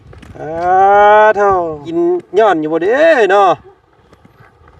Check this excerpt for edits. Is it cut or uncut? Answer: cut